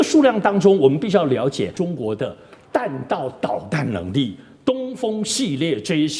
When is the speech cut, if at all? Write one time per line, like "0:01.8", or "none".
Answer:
0:01.7